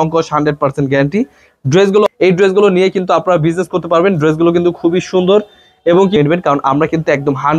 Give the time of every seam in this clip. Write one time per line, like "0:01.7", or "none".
0:02.1
0:06.2